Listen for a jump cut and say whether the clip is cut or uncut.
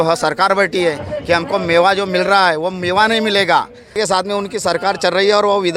cut